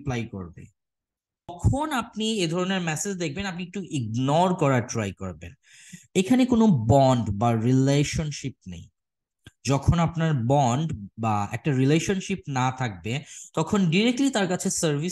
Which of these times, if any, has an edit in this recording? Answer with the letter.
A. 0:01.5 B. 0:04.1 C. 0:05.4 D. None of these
A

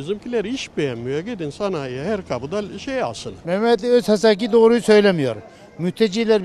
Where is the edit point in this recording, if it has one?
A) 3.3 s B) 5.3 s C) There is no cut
A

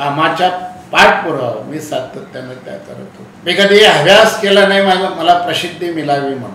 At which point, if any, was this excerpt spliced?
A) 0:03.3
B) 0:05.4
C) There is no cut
A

